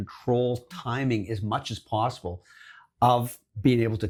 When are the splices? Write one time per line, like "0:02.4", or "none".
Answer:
none